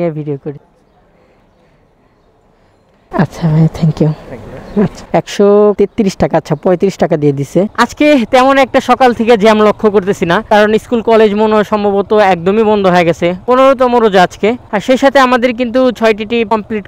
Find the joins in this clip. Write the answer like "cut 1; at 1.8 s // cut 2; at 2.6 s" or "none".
none